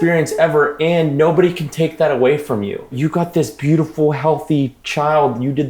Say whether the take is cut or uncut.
cut